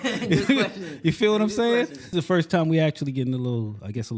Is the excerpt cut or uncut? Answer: cut